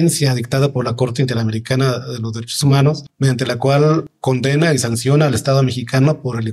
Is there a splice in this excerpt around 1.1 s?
no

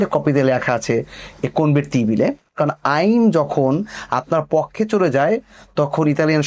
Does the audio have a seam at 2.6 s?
yes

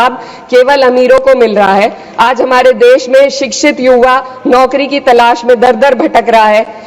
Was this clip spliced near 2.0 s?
no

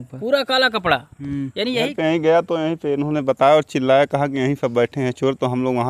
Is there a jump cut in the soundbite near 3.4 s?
no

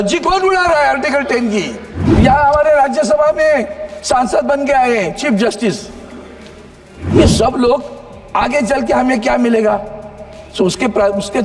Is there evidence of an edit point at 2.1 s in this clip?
yes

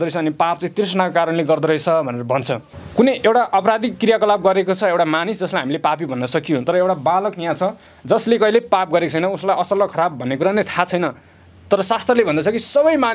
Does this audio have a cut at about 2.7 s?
yes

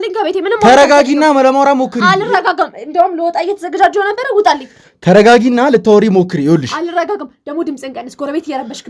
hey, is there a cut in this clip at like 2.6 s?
no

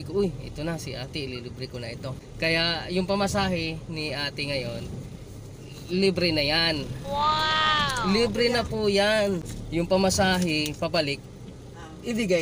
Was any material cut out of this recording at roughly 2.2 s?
yes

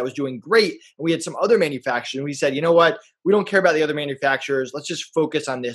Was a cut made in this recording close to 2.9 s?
no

